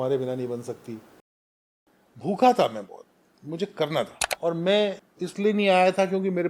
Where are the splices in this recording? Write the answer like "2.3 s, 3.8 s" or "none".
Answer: 1.4 s, 4.2 s, 5.1 s